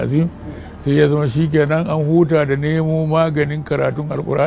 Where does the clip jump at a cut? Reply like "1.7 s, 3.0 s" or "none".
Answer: none